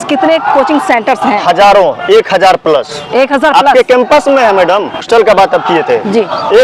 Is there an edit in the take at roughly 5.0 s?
yes; 1 cut; at 5.0 s

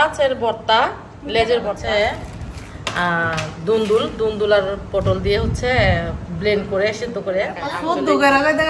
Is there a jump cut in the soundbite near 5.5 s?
no; 2 cuts; at 1.8 s, 7.6 s

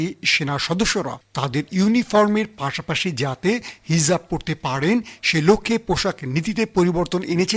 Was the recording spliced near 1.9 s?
no; 0 cuts

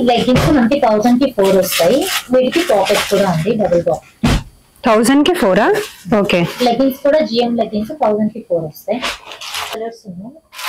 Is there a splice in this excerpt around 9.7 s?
yes; 1 cut; at 9.7 s

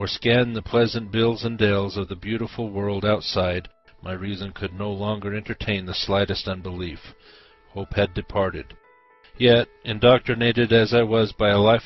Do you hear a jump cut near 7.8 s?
no; 1 cut; at 5.0 s

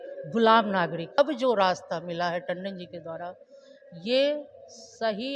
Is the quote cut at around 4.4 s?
no; 1 cut; at 1.2 s

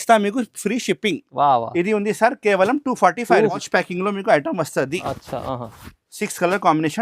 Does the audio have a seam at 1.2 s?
no; 1 cut; at 3.6 s

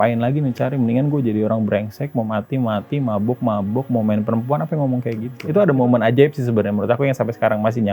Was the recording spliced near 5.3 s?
yes; 1 cut; at 5.3 s

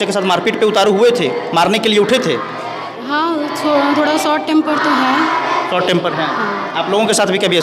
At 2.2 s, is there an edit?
no; 0 cuts

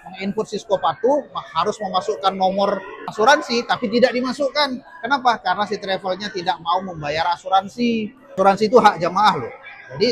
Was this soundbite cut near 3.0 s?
yes; 2 cuts; at 3.0 s, 8.2 s

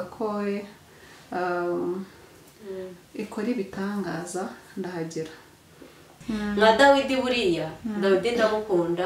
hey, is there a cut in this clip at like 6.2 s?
yes; 1 cut; at 6.2 s

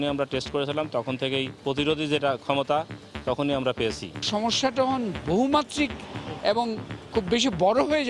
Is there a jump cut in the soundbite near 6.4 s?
no; 2 cuts; at 1.6 s, 4.1 s

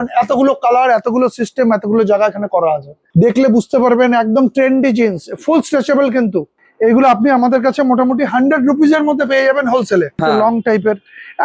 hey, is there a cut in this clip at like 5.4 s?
no; 3 cuts; at 2.9 s, 6.6 s, 10.2 s

